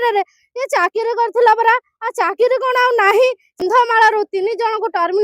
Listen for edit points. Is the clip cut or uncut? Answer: cut